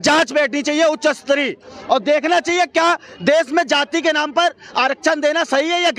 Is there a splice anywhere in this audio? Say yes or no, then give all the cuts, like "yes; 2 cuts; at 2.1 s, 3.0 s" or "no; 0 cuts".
no; 0 cuts